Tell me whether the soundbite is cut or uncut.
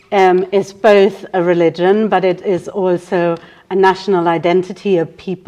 uncut